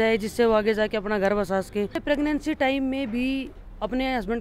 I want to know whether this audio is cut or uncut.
cut